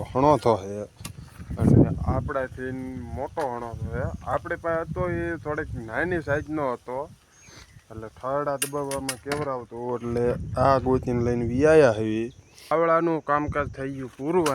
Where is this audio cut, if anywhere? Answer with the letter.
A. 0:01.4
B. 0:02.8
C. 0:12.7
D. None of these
C